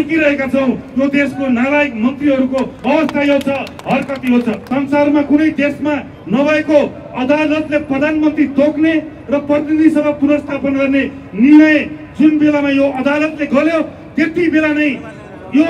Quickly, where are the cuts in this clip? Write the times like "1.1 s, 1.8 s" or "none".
4.6 s

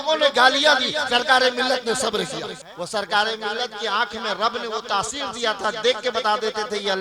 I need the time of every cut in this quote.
2.6 s

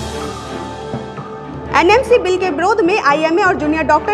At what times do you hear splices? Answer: 1.4 s

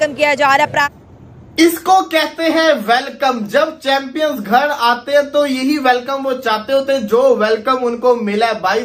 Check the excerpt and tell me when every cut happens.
1.3 s

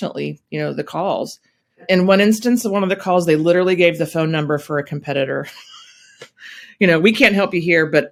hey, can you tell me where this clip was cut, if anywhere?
none

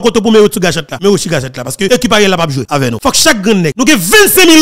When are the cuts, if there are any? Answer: 0.9 s, 1.9 s, 2.7 s, 3.7 s

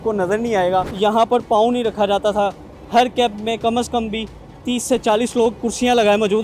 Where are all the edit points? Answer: 0.9 s

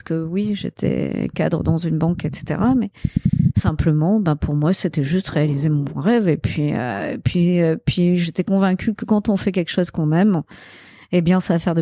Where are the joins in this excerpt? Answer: none

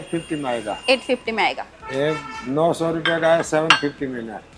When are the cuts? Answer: 1.7 s

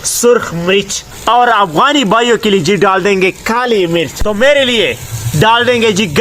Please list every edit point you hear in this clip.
1.1 s, 4.1 s

